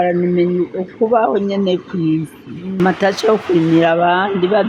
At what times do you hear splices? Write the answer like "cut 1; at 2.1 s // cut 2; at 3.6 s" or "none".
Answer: cut 1; at 2.8 s